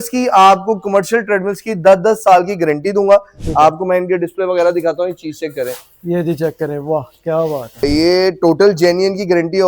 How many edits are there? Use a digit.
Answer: 2